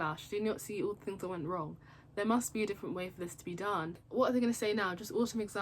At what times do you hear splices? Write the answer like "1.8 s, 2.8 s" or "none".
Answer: 3.9 s